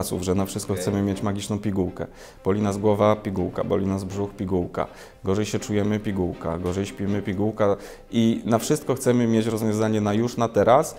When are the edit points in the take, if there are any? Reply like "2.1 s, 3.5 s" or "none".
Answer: none